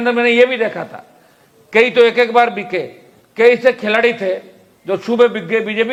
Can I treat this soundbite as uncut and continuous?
yes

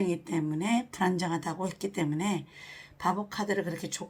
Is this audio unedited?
yes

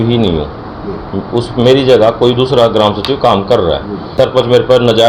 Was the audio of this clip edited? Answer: yes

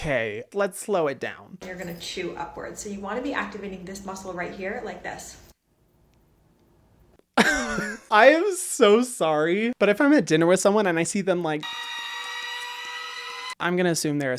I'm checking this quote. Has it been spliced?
yes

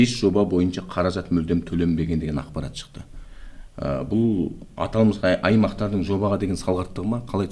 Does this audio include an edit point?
no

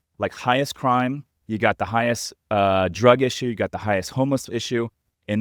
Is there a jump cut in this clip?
no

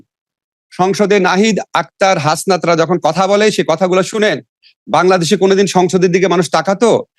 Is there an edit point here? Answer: no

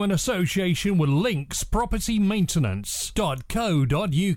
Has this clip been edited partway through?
no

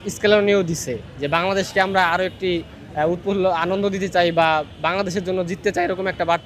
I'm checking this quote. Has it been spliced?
no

